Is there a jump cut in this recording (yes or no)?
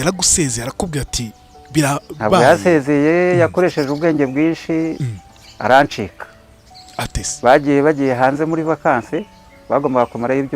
no